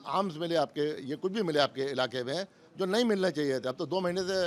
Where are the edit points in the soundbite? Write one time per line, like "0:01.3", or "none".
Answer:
none